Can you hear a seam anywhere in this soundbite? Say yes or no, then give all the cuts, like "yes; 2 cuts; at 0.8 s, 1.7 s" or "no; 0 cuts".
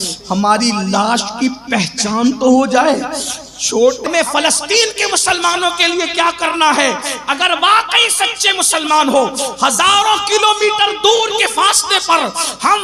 yes; 1 cut; at 4.1 s